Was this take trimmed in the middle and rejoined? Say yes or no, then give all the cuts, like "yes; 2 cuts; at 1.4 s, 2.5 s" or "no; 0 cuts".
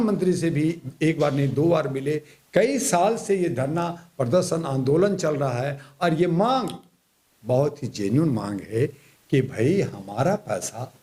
no; 0 cuts